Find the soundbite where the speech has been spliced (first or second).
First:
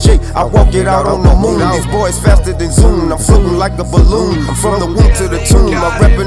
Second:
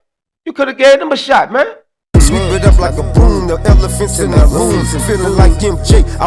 second